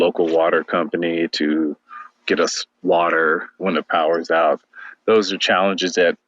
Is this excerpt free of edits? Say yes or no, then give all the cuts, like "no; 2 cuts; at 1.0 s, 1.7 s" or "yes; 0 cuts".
no; 3 cuts; at 2.7 s, 3.6 s, 4.6 s